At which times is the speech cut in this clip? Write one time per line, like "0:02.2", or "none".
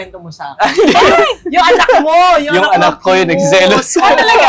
none